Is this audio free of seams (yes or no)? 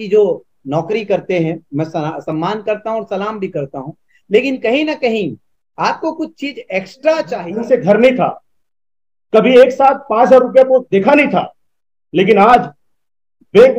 no